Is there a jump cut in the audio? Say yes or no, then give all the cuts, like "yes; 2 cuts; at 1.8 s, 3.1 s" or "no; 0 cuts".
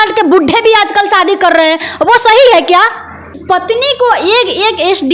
yes; 1 cut; at 3.3 s